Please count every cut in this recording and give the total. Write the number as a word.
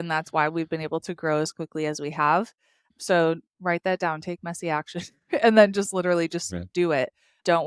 zero